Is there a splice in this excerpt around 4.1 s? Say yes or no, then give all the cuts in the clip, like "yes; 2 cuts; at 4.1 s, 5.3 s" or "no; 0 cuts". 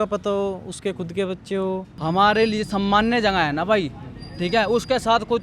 no; 1 cut; at 1.9 s